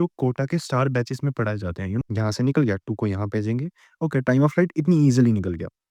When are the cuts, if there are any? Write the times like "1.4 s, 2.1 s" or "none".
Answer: 2.0 s